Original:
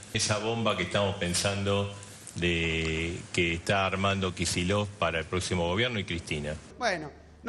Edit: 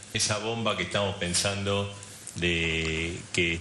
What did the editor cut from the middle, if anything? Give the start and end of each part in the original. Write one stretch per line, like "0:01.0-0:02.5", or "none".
none

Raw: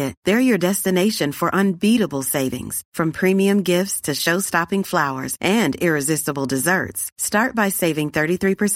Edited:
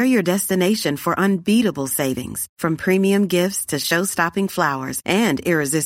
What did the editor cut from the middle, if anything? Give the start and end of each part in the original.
none

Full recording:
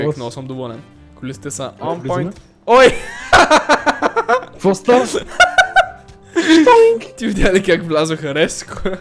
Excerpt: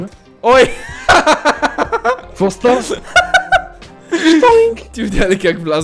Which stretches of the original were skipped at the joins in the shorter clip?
none

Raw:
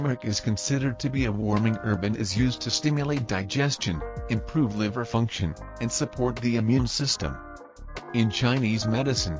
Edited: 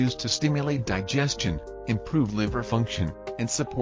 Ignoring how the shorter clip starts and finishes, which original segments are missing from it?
none

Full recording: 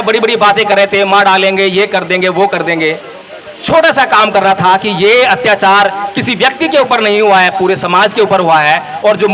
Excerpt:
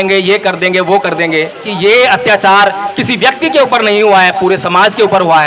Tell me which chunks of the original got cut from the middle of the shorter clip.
0:03.2-0:04.9

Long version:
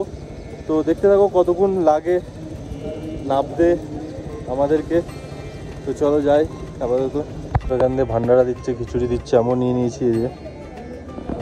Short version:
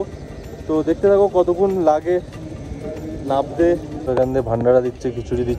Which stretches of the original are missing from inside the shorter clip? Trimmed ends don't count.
0:03.9-0:07.6

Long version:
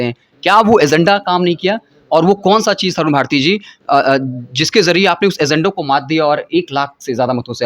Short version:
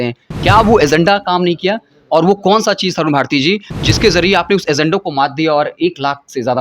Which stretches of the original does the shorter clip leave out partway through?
0:03.7-0:04.4

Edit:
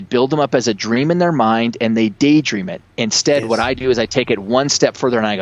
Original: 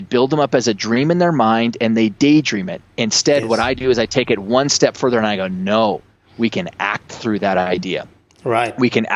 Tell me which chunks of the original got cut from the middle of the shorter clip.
none

